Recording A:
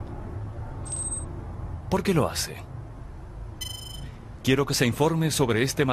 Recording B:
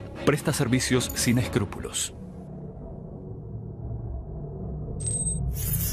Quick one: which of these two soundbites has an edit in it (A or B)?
A